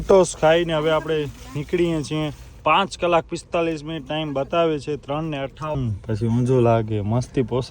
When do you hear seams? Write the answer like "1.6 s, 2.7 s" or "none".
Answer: 5.8 s